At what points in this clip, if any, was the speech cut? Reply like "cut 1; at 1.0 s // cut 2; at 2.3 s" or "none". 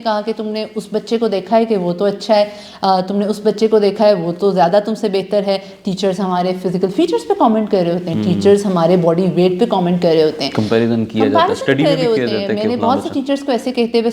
none